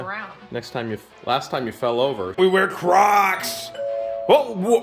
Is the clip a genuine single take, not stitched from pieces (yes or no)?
no